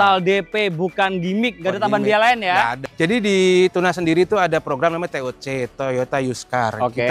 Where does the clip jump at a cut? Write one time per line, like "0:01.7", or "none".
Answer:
0:02.9